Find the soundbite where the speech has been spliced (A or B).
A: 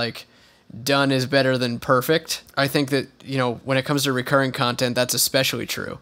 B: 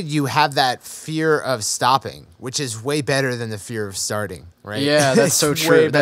A